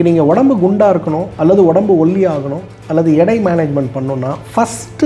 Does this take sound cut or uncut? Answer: cut